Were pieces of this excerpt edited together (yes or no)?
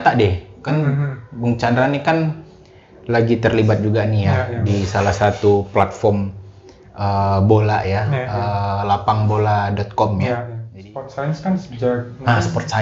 yes